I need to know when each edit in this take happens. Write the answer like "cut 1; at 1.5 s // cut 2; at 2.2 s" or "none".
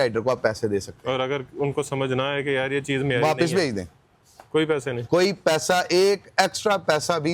none

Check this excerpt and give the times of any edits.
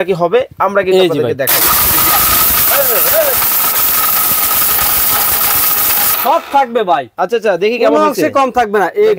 cut 1; at 6.1 s

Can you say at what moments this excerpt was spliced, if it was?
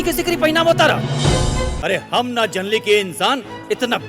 cut 1; at 1.7 s

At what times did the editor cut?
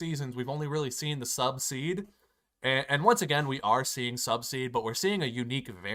none

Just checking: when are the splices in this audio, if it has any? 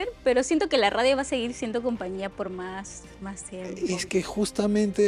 none

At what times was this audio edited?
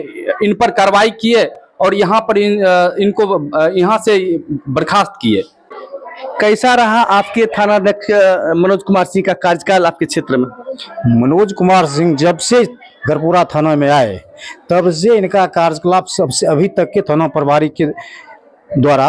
none

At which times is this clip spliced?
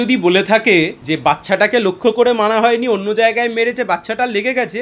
cut 1; at 1.0 s

